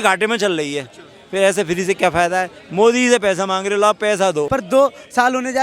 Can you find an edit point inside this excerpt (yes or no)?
yes